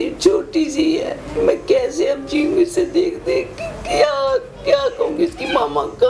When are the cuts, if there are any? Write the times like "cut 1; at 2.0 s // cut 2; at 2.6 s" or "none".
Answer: none